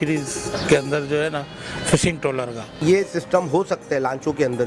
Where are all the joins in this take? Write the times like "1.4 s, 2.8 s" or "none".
2.7 s